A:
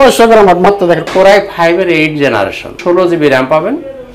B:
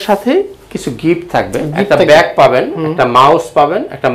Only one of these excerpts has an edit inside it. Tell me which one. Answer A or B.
A